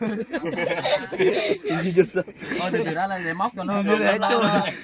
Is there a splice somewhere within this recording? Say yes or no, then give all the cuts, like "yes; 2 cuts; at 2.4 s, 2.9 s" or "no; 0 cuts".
yes; 1 cut; at 1.1 s